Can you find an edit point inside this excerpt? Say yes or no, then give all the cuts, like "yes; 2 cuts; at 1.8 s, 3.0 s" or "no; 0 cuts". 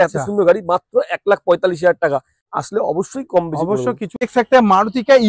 yes; 2 cuts; at 2.4 s, 4.2 s